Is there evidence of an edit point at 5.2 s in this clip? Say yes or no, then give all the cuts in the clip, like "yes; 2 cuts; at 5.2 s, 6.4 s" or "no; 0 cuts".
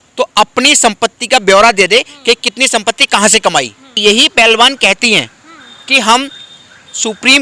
no; 1 cut; at 3.9 s